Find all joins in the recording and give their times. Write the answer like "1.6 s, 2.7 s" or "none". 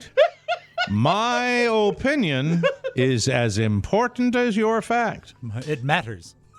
none